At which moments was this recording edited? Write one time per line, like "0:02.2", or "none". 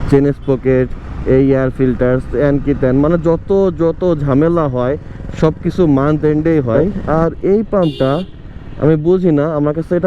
0:06.8